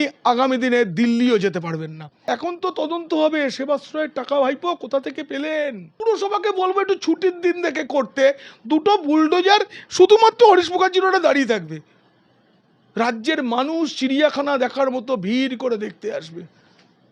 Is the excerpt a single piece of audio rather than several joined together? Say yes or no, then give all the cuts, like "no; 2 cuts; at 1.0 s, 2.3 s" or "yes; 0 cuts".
no; 2 cuts; at 2.1 s, 5.8 s